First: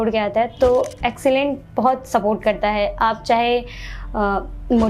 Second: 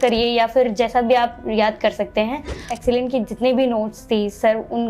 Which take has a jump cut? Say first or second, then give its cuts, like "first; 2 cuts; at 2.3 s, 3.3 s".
second; 1 cut; at 2.7 s